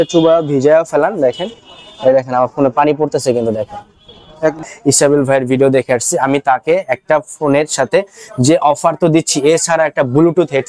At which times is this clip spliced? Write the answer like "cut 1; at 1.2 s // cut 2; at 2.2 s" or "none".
cut 1; at 4.6 s